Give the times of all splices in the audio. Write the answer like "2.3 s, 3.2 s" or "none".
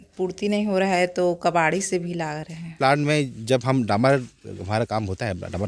2.7 s

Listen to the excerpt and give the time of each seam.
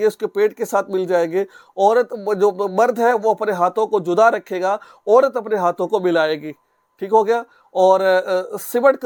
none

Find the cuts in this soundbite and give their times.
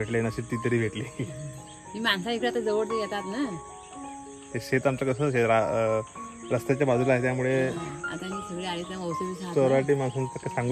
none

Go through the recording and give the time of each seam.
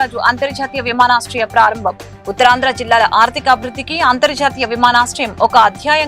none

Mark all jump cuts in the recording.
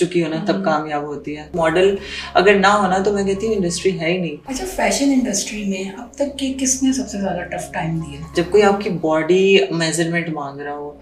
1.5 s, 4.4 s, 8.2 s

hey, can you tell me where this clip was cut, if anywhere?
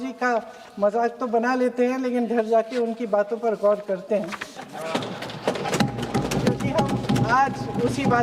none

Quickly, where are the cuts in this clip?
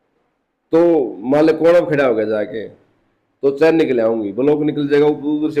none

